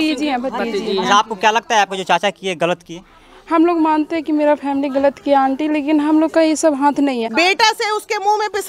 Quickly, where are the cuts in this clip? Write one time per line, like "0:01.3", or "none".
0:07.3